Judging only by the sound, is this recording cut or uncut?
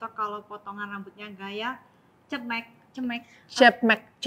uncut